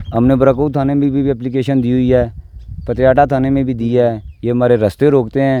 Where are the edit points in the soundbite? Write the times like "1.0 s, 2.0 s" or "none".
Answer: none

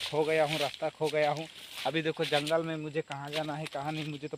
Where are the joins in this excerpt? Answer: none

